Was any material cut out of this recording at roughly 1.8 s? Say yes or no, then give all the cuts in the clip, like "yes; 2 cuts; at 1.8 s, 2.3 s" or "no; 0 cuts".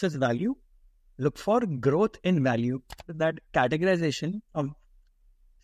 no; 1 cut; at 3.1 s